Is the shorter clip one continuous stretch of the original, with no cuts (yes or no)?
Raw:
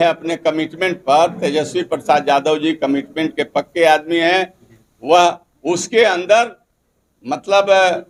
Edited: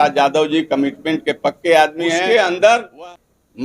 no